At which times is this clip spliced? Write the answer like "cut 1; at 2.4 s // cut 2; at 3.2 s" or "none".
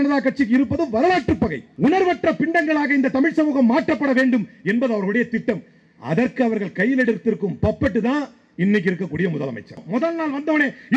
cut 1; at 1.6 s // cut 2; at 9.8 s